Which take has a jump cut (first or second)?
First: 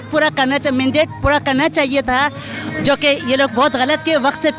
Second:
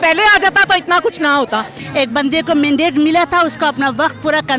second